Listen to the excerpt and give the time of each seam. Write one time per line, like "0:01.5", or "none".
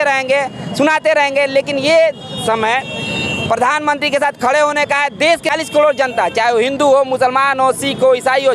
0:05.5